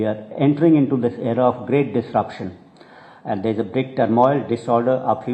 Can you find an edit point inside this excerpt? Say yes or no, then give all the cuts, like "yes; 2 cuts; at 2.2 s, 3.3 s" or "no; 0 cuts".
no; 0 cuts